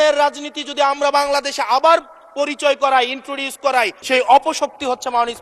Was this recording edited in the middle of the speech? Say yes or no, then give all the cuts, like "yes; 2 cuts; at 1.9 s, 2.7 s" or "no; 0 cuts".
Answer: yes; 1 cut; at 4.0 s